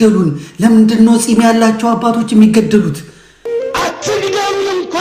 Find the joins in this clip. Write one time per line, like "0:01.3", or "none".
0:03.4